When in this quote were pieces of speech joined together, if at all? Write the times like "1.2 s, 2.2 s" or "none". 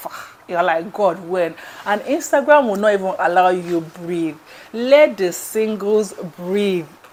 none